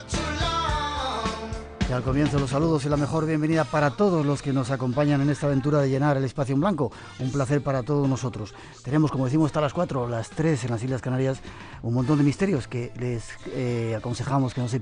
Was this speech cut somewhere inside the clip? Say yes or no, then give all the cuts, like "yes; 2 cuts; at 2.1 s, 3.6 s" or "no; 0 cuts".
no; 0 cuts